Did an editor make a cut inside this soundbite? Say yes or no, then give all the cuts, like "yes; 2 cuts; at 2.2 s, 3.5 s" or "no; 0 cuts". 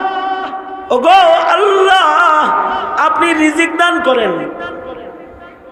no; 0 cuts